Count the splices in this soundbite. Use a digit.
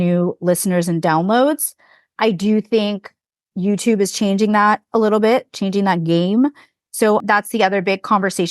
2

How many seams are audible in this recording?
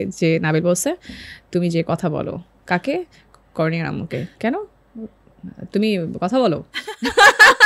0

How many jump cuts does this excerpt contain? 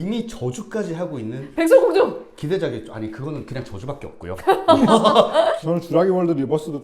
1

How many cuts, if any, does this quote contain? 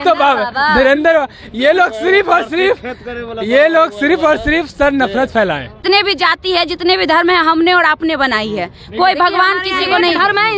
1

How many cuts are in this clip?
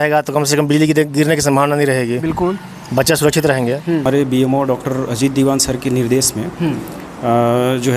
1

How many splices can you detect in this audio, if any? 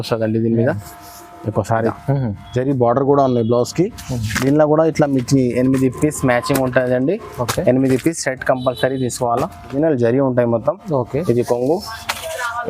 2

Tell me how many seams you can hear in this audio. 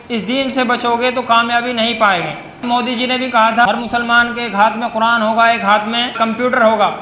3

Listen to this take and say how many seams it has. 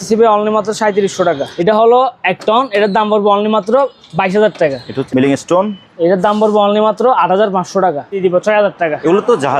3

